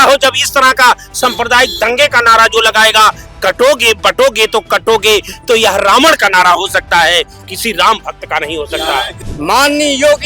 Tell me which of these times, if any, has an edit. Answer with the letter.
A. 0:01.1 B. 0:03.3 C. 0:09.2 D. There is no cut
C